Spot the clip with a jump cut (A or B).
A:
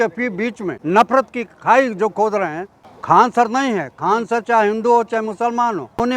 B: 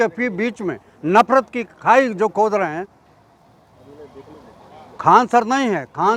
A